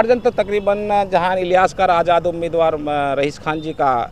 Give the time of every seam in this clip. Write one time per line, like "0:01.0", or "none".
none

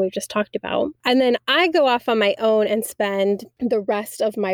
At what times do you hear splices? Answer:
0:01.0
0:03.5

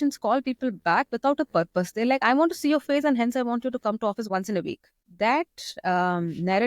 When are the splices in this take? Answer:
0:04.2

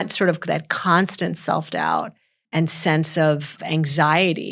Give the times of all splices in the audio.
0:03.6

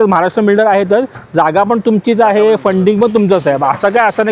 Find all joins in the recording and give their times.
none

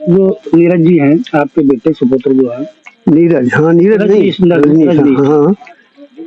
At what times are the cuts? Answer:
none

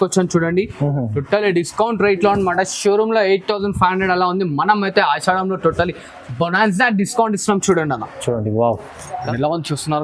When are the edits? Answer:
0:09.1

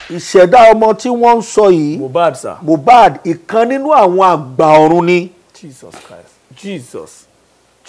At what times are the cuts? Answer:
none

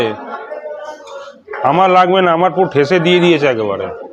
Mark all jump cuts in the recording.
none

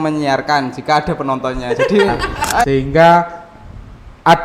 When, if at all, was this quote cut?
0:02.6

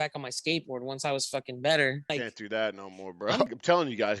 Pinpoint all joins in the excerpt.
0:02.1
0:03.5

